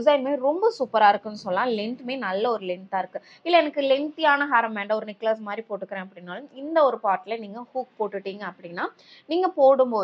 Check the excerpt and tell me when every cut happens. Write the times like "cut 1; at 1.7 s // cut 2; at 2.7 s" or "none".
none